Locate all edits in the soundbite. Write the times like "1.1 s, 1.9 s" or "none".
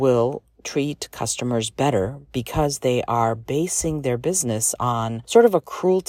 5.2 s